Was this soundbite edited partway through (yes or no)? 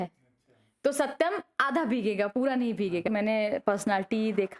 yes